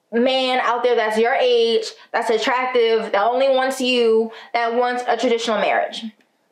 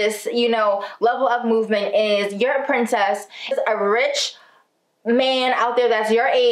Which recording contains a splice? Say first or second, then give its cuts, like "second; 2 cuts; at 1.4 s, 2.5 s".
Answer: second; 1 cut; at 3.5 s